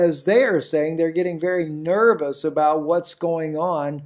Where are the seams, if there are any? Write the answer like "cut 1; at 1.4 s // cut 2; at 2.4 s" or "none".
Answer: none

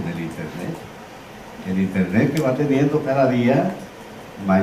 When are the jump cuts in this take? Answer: cut 1; at 3.3 s

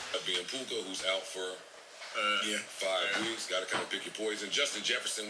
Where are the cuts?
none

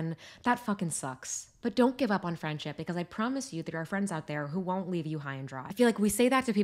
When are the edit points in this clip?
none

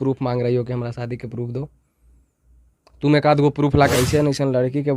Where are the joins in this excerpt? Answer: cut 1; at 3.9 s

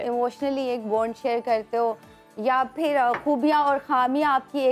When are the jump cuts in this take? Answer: none

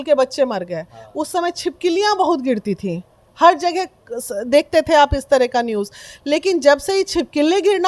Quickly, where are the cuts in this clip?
none

